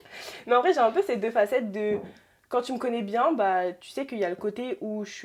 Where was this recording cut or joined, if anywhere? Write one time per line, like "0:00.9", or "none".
none